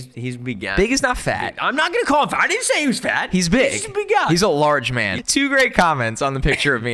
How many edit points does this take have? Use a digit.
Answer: 1